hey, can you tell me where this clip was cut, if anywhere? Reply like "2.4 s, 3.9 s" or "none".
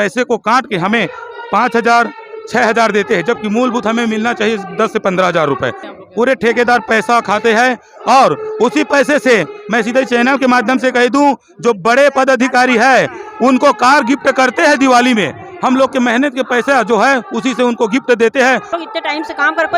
5.9 s, 18.7 s